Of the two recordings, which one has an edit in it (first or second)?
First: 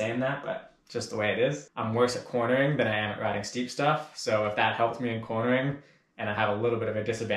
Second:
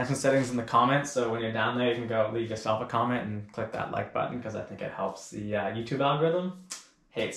first